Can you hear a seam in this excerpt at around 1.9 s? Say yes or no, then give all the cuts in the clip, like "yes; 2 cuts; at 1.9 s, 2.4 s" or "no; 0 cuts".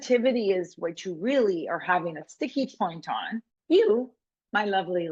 no; 1 cut; at 3.5 s